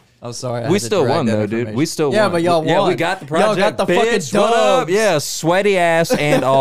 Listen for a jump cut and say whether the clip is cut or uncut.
uncut